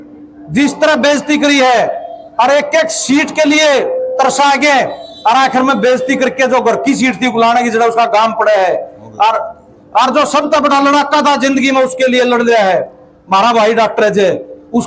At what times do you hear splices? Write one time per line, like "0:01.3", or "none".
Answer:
none